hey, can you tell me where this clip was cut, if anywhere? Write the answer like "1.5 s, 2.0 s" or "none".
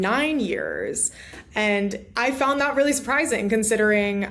none